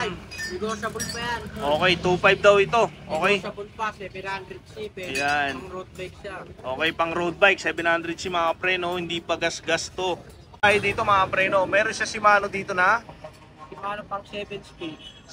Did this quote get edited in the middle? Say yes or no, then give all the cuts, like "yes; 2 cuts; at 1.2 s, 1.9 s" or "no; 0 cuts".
yes; 1 cut; at 10.6 s